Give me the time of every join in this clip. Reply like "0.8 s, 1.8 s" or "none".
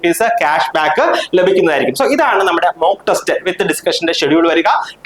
none